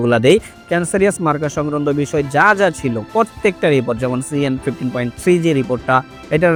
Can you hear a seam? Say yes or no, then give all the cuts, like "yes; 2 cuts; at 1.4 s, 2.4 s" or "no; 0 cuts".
no; 0 cuts